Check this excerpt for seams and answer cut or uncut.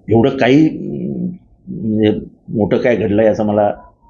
uncut